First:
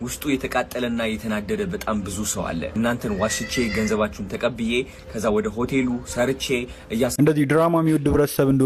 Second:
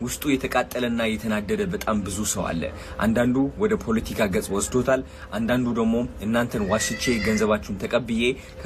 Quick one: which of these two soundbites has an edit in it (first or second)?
first